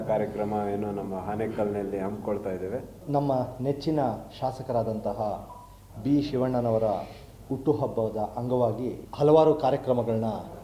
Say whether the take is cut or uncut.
cut